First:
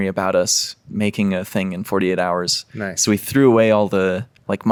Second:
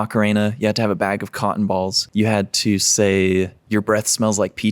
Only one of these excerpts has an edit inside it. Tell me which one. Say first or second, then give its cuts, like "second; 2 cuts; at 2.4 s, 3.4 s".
second; 1 cut; at 2.0 s